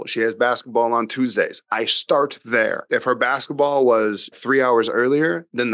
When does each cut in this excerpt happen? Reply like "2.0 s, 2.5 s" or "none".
2.8 s, 4.3 s

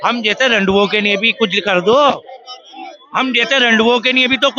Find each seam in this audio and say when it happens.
none

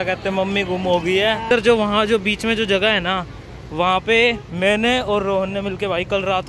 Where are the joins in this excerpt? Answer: 1.5 s

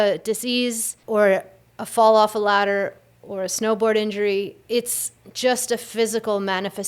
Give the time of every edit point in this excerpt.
0.9 s, 4.6 s

